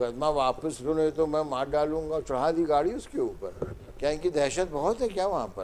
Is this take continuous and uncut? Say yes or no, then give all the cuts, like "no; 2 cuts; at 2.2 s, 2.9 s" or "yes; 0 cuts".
no; 1 cut; at 4.2 s